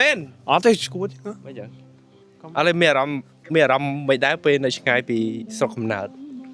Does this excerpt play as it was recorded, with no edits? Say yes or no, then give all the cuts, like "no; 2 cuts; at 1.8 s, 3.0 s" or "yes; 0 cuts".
yes; 0 cuts